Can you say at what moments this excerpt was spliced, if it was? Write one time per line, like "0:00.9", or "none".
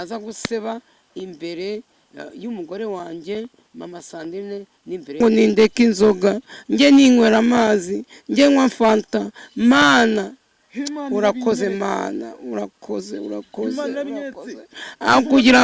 0:05.2